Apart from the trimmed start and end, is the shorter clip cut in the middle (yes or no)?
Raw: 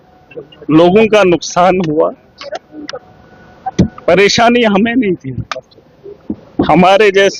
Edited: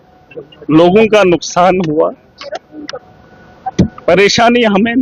no